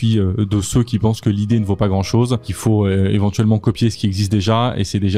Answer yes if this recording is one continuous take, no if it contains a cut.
no